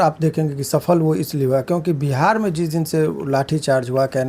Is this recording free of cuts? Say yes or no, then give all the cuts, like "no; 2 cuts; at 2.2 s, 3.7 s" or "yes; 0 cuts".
yes; 0 cuts